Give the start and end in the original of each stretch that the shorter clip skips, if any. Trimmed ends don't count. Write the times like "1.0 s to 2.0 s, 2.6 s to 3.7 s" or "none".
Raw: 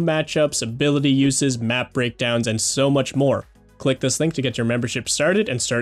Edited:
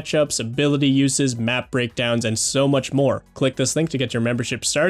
3.5 s to 3.7 s

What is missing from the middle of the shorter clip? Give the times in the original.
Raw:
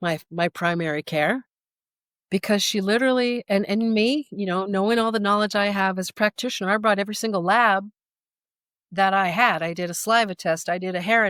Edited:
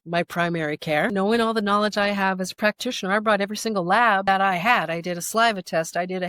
1.4 s to 4.7 s, 7.8 s to 9.0 s

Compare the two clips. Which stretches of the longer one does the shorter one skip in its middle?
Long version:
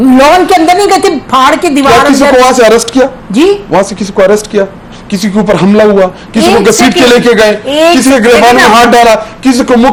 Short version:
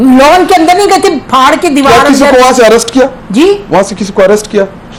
none

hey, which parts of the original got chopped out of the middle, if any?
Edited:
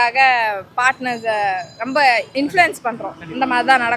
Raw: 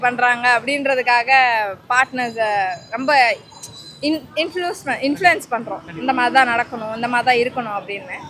3.4 s to 5.0 s

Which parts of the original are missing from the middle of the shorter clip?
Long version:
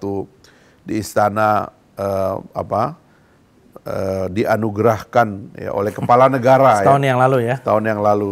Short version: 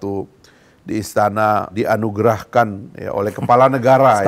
1.7 s to 4.3 s

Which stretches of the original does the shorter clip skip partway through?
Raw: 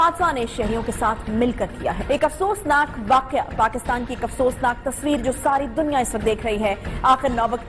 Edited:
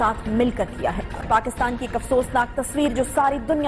2.1 s to 3.4 s

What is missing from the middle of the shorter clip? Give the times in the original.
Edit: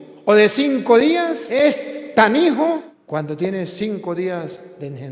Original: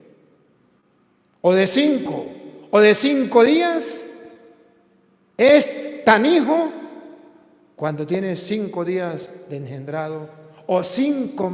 3.9 s to 5.3 s, 6.8 s to 7.6 s

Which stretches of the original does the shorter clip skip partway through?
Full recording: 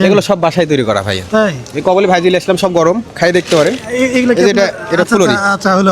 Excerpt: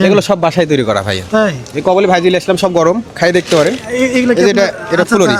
none

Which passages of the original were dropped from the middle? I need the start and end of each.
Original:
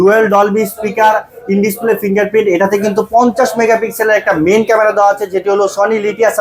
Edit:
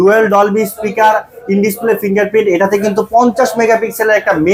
none

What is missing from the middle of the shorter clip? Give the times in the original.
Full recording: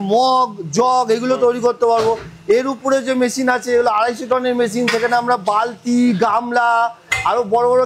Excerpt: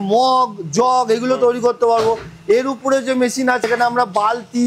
3.6 s to 4.9 s

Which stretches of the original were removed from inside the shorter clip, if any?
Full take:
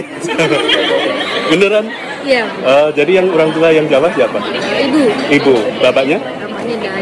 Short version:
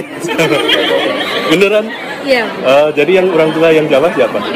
none

